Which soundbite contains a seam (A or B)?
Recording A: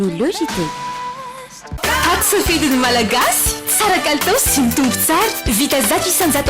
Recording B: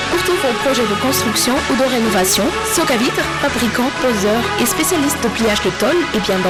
A